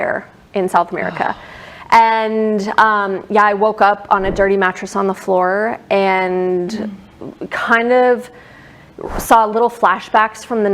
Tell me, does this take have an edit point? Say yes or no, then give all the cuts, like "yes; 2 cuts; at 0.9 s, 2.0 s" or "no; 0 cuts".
no; 0 cuts